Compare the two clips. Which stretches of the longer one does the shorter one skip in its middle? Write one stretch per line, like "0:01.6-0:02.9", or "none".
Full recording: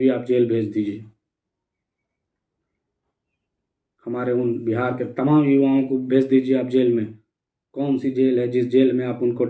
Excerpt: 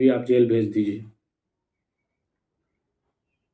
none